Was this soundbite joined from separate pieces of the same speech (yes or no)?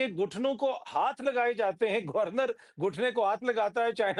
no